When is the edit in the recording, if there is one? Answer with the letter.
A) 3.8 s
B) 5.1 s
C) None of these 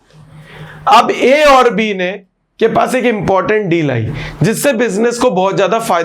C